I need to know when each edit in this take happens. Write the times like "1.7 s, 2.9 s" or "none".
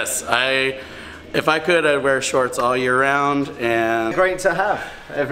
4.1 s